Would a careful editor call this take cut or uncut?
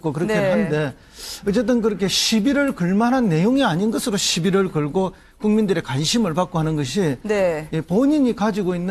uncut